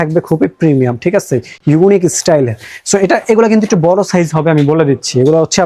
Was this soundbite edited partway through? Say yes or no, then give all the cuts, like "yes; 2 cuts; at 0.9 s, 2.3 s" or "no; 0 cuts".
no; 0 cuts